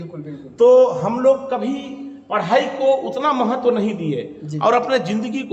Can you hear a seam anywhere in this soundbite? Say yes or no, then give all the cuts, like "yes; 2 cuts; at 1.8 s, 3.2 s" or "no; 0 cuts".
no; 0 cuts